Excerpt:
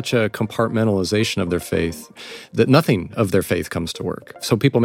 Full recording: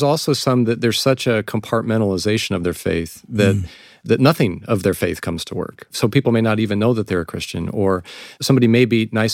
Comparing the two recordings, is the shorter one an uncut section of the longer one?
no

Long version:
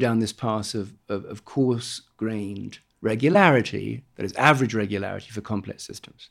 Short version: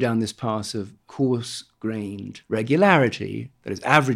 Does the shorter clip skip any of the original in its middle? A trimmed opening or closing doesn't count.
yes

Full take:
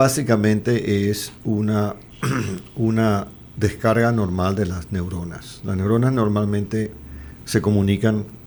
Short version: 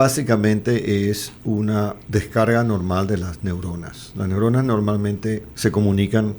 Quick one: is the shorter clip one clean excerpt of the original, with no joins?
no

